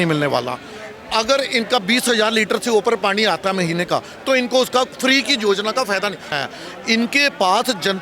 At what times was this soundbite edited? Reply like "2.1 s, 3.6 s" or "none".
6.3 s